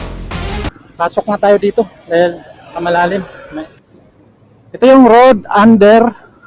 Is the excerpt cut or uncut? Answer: cut